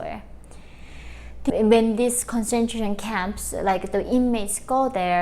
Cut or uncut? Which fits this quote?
cut